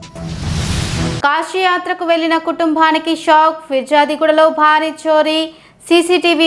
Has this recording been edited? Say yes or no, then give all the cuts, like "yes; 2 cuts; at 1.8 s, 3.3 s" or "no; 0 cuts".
yes; 1 cut; at 1.2 s